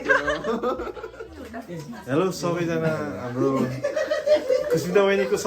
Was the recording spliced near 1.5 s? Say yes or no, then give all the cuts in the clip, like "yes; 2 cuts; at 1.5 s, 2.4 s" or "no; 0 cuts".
yes; 1 cut; at 1.5 s